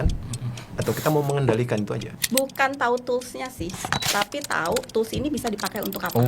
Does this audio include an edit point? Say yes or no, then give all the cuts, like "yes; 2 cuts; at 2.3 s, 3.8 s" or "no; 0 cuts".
yes; 1 cut; at 2.1 s